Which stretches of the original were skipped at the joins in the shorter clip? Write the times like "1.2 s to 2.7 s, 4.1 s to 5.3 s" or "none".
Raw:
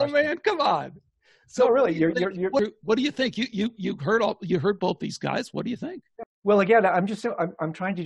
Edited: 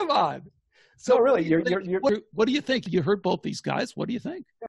3.3 s to 4.4 s